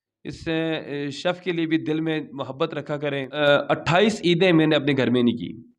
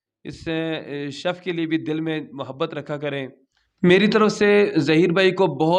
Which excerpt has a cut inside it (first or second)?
first